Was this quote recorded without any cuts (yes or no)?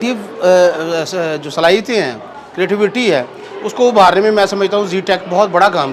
yes